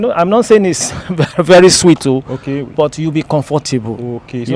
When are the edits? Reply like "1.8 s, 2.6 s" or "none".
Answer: none